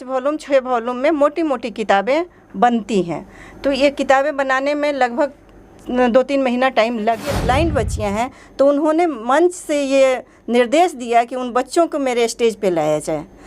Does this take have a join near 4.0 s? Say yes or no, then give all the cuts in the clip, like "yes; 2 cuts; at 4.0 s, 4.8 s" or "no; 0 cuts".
no; 1 cut; at 7.3 s